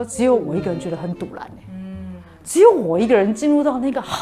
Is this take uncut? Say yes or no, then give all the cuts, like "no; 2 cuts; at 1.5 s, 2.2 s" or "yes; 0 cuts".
yes; 0 cuts